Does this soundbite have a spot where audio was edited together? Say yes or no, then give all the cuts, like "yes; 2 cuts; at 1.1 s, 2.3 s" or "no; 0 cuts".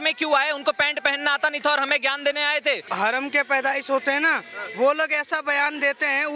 yes; 1 cut; at 2.9 s